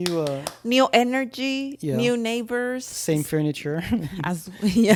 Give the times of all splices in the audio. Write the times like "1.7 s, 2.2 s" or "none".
none